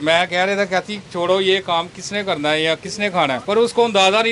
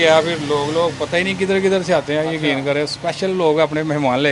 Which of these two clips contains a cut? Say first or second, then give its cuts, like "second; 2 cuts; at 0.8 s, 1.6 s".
first; 1 cut; at 3.4 s